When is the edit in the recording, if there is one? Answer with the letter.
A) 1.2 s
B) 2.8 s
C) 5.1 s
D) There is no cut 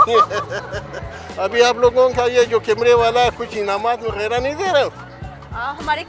A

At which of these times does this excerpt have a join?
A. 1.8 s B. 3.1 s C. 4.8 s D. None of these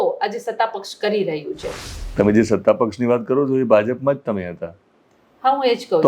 A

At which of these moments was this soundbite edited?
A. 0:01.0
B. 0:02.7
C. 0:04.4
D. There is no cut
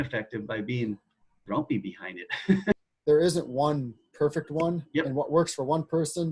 B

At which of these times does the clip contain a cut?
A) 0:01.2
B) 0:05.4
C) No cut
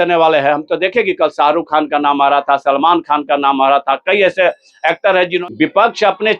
B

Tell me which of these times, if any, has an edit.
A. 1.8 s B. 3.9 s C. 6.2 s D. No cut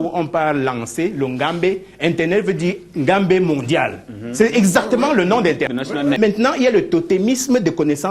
C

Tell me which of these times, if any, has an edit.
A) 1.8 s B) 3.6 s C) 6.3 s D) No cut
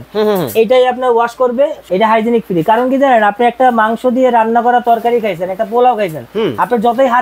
A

